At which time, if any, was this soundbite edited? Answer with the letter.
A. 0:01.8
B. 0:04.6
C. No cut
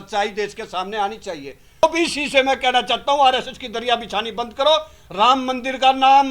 A